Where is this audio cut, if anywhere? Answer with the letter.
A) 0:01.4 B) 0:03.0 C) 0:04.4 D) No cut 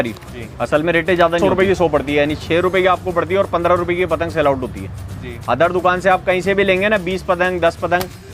A